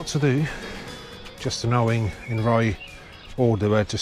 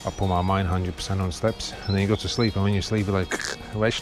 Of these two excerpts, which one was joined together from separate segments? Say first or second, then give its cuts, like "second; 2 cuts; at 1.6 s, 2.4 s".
second; 1 cut; at 1.8 s